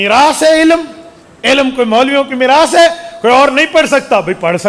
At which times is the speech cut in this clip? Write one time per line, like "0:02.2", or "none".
none